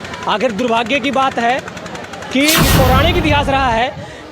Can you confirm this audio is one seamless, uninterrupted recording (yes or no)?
no